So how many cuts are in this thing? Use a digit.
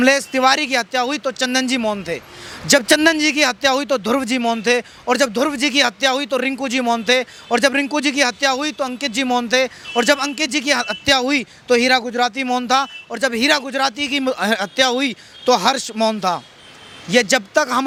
0